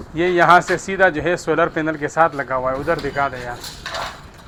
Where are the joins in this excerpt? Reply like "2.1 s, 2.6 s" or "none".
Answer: none